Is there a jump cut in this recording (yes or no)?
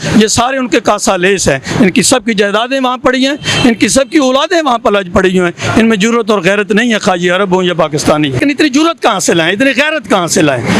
yes